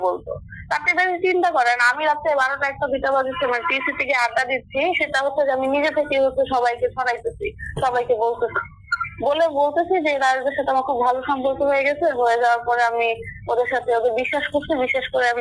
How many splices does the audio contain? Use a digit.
0